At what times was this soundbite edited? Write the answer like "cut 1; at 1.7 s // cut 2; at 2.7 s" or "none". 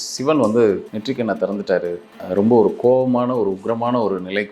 cut 1; at 0.9 s // cut 2; at 2.1 s